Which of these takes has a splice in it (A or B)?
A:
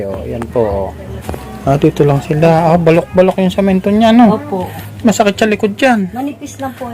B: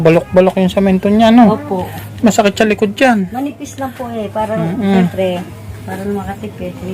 A